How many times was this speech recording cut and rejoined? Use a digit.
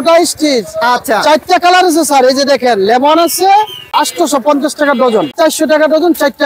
2